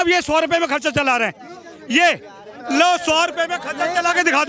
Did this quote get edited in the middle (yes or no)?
no